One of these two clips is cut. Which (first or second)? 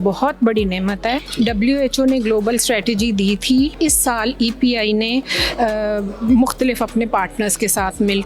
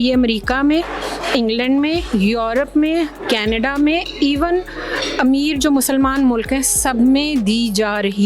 first